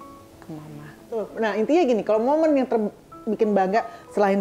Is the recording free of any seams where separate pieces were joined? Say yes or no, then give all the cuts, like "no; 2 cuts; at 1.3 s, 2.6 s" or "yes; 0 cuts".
no; 1 cut; at 1.3 s